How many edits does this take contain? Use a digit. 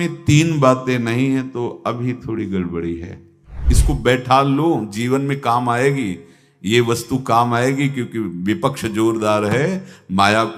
1